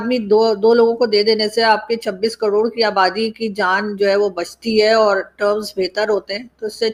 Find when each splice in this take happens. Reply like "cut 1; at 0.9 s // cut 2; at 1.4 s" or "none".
none